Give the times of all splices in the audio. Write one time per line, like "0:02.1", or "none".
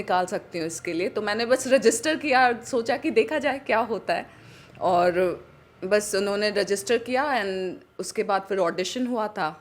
none